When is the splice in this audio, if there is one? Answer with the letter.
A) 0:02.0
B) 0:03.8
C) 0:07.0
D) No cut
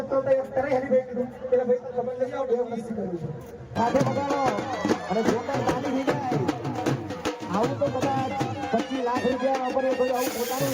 B